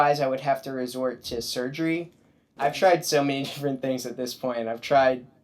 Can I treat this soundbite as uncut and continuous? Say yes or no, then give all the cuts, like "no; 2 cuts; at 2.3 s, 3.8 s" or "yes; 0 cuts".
no; 1 cut; at 2.5 s